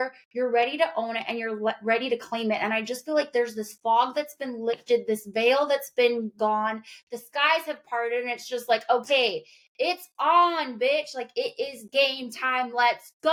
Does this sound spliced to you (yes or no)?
no